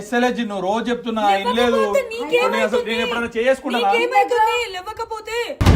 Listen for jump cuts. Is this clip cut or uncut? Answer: uncut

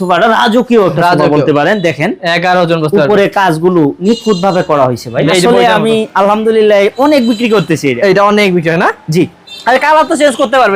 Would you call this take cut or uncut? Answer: cut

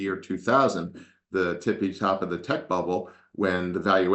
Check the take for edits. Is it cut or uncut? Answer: uncut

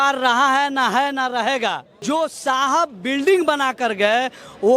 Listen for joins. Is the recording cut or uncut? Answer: cut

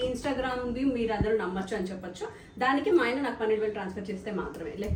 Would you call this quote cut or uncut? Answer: uncut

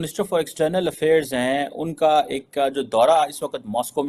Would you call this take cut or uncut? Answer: uncut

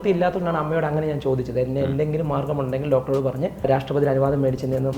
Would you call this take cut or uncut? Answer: cut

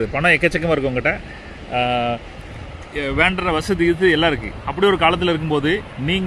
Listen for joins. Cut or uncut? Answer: uncut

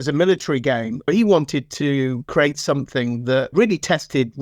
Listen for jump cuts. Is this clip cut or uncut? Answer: cut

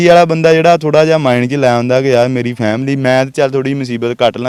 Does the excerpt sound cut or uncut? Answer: uncut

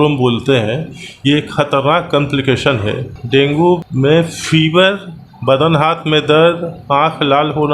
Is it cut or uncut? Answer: cut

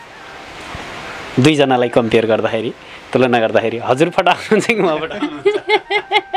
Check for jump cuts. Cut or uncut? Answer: uncut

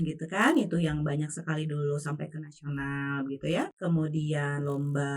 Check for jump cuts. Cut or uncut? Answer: cut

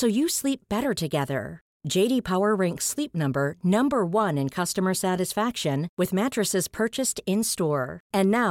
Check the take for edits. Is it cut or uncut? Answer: uncut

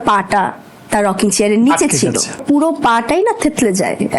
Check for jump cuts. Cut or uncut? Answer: cut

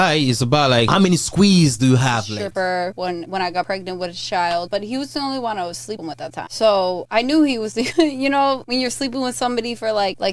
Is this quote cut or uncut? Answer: cut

